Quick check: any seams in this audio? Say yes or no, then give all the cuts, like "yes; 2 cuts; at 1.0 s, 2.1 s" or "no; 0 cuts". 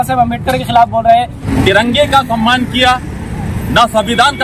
yes; 1 cut; at 1.4 s